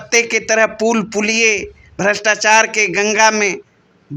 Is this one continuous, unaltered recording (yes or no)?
yes